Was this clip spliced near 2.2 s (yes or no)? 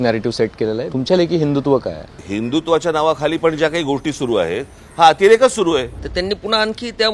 yes